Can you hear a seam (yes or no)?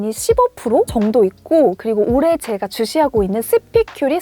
no